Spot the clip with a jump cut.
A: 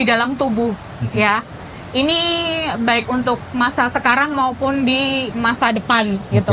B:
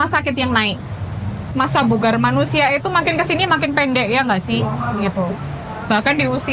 B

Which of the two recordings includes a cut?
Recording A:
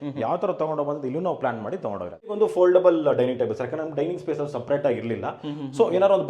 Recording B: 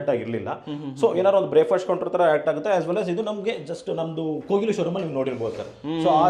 A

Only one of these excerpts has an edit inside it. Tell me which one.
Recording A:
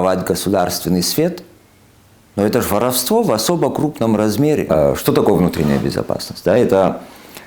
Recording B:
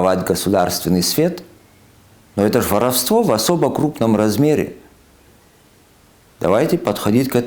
A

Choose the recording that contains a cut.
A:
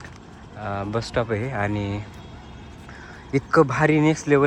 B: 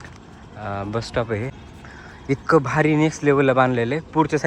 B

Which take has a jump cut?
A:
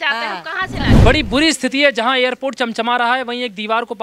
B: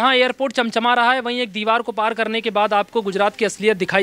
A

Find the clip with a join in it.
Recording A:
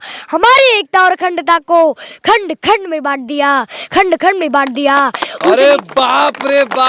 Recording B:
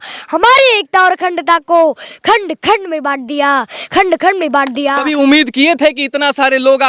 B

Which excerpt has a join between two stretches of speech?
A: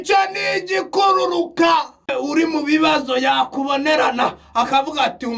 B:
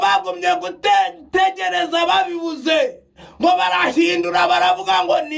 A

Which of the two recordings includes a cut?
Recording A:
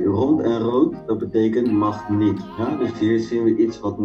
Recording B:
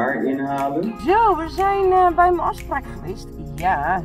B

